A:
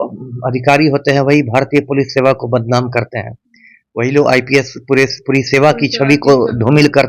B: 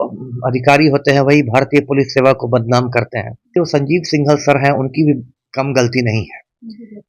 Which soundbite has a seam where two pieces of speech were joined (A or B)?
B